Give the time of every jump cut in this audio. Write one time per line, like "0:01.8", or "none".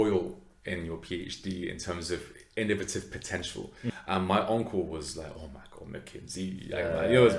0:03.9